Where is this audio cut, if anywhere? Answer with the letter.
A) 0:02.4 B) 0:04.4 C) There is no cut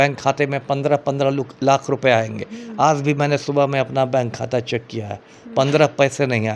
C